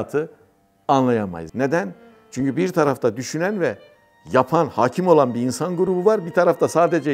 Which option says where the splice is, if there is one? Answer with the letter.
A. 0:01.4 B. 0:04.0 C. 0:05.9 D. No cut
A